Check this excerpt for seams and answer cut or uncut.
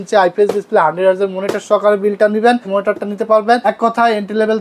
cut